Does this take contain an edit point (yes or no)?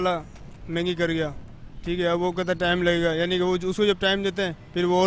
no